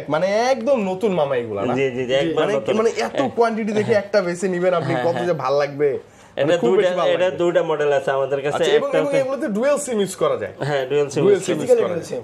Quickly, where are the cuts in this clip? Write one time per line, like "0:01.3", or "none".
none